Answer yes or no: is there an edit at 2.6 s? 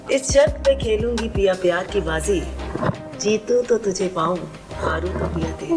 no